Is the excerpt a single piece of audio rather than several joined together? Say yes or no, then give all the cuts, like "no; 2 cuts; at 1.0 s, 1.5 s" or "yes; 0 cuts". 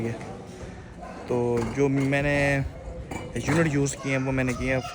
yes; 0 cuts